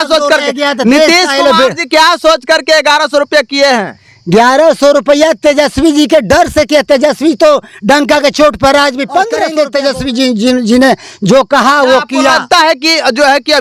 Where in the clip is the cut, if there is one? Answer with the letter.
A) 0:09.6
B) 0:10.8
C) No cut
A